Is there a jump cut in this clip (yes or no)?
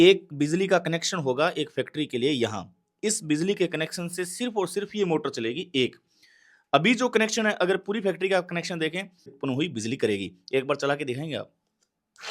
yes